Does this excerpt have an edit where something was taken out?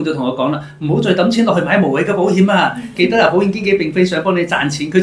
no; 0 cuts

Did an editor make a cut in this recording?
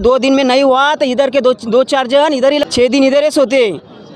yes; 1 cut; at 2.6 s

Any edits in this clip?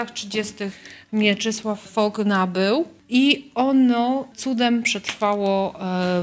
yes; 3 cuts; at 1.9 s, 3.0 s, 4.3 s

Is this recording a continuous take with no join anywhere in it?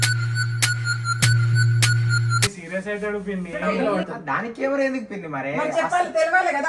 no; 1 cut; at 3.7 s

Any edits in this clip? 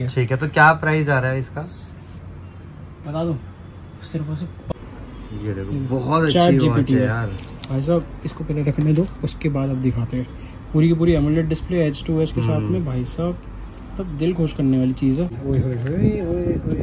yes; 2 cuts; at 4.7 s, 15.4 s

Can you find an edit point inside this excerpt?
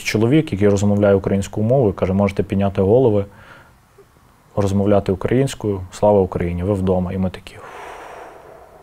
no; 0 cuts

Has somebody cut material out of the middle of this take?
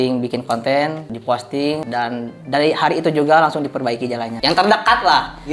yes; 2 cuts; at 1.8 s, 4.3 s

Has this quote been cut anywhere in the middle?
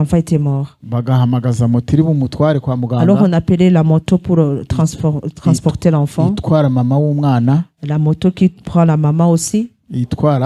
no; 0 cuts

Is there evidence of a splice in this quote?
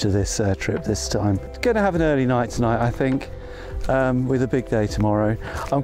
no; 0 cuts

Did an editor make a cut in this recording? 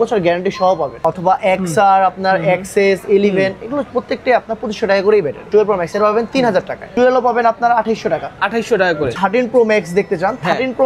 yes; 4 cuts; at 1.0 s, 5.4 s, 6.9 s, 9.1 s

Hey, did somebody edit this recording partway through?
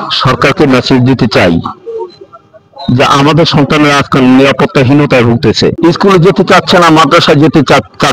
yes; 1 cut; at 5.8 s

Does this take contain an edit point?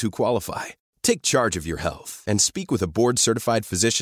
no; 0 cuts

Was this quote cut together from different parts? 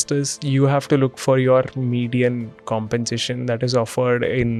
no; 0 cuts

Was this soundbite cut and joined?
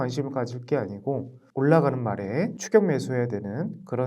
yes; 2 cuts; at 1.4 s, 2.6 s

